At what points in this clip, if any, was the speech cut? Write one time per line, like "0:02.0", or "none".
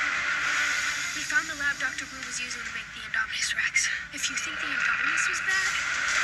none